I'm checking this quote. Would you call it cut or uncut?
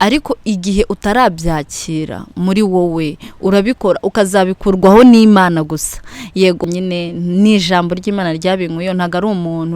cut